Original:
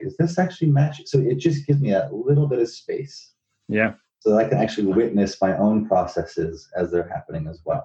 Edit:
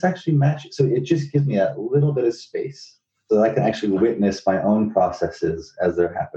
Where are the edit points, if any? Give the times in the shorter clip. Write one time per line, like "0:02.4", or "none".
0:03.1